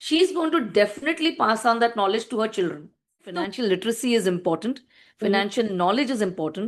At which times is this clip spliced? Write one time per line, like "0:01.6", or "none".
0:03.5